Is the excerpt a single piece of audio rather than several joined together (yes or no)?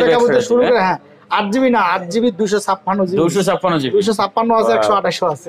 yes